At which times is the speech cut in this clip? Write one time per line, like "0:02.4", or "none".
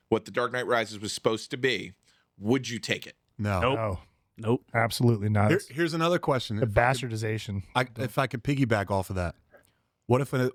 none